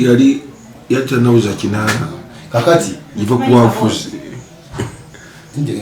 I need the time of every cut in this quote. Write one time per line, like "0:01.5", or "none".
none